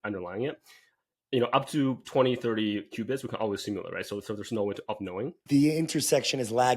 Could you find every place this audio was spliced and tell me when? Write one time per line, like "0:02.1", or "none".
0:05.4